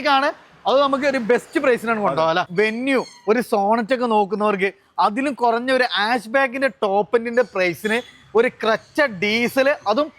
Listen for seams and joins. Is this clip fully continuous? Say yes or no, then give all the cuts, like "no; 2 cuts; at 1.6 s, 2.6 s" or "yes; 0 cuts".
no; 1 cut; at 2.5 s